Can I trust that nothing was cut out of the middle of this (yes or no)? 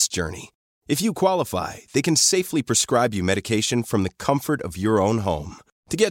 yes